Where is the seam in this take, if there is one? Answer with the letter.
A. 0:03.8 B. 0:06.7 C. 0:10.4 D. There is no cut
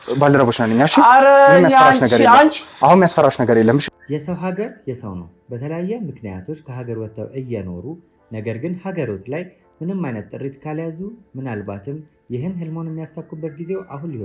A